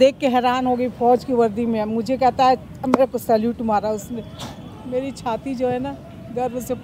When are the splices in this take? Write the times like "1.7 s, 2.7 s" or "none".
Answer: none